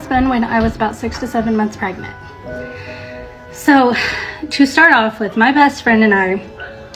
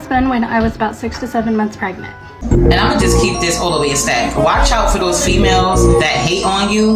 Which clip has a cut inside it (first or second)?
second